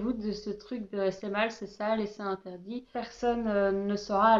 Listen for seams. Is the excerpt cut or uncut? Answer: cut